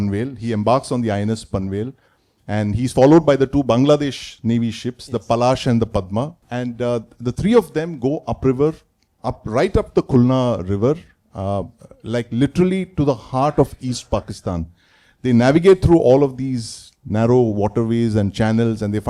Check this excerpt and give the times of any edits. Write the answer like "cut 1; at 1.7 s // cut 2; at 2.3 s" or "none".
none